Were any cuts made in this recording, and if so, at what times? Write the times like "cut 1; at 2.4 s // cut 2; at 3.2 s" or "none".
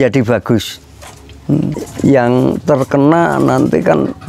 cut 1; at 1.8 s